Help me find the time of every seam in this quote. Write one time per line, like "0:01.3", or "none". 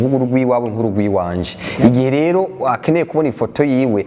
none